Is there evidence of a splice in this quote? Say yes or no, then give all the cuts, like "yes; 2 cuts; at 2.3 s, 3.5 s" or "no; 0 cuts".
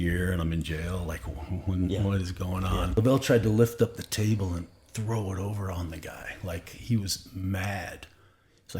yes; 1 cut; at 2.9 s